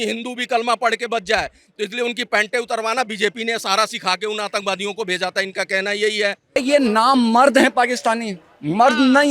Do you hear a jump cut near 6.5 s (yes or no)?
yes